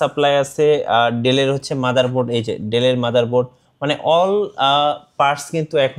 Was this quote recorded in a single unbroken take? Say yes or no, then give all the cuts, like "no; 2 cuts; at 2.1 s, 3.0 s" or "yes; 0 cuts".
yes; 0 cuts